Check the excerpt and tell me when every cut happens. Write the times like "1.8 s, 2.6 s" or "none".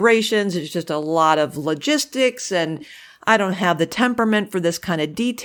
none